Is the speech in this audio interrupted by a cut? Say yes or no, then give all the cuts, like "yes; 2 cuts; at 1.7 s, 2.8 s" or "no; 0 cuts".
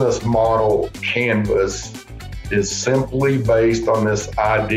yes; 1 cut; at 1.0 s